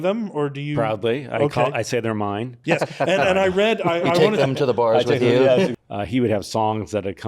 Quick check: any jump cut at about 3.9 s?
no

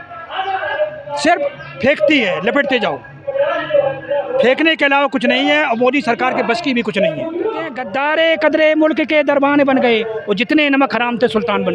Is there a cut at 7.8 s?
yes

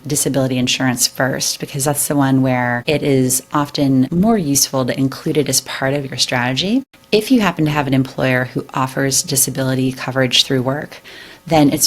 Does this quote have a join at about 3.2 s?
no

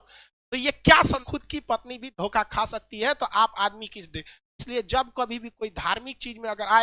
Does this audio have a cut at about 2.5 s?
no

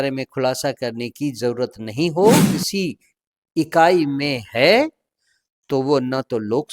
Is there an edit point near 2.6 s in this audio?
yes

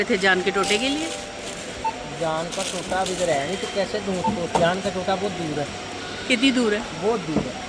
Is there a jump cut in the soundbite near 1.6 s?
no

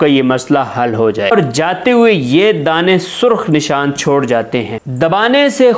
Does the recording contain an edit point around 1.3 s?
yes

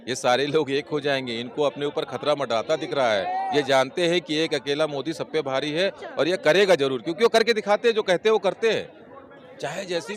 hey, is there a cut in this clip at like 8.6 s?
no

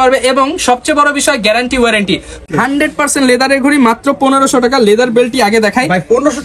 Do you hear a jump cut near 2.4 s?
yes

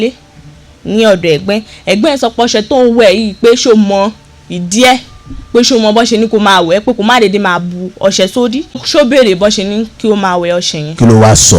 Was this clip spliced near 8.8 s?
yes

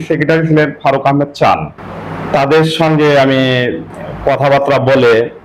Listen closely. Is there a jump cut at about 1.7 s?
no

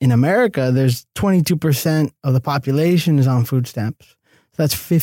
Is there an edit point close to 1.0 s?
yes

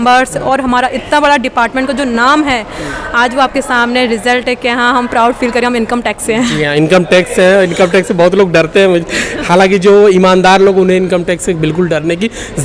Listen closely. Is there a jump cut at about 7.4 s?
no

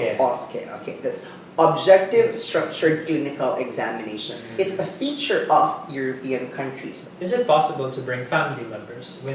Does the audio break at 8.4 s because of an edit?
no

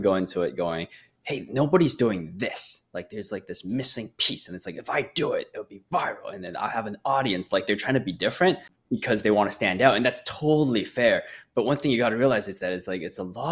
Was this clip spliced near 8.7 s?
yes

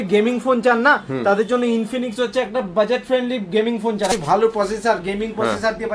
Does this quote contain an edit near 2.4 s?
no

